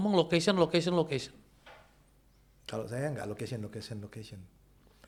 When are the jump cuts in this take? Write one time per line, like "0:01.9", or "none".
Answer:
none

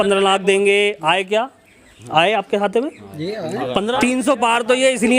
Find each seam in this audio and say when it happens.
0:04.0

